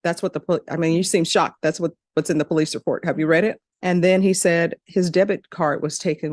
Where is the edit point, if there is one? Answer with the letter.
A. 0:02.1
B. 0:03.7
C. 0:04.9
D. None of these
B